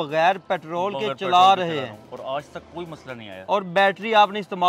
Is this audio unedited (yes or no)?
yes